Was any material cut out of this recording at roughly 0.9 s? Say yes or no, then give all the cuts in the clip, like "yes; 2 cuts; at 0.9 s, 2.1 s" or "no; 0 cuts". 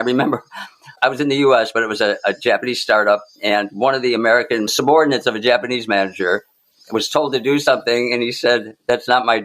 yes; 2 cuts; at 0.9 s, 4.7 s